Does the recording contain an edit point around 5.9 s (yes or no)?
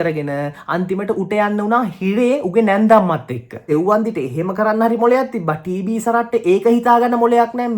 no